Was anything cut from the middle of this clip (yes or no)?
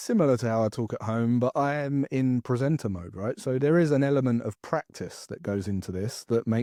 no